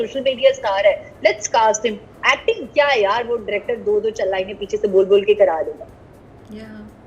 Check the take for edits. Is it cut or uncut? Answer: uncut